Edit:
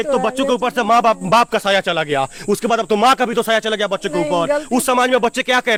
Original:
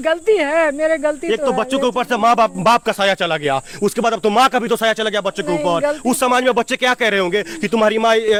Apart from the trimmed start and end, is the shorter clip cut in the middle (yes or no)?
no